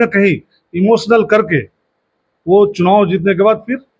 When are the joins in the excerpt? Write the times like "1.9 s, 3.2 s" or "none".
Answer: none